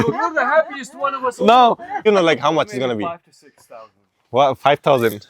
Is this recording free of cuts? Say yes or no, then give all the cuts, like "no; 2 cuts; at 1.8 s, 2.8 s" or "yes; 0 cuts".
no; 1 cut; at 2.0 s